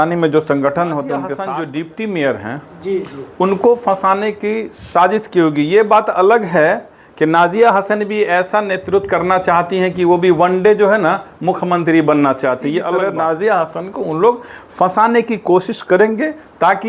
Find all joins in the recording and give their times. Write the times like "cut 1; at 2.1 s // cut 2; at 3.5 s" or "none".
cut 1; at 1.3 s // cut 2; at 13.0 s